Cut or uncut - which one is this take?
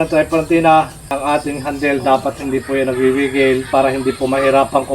cut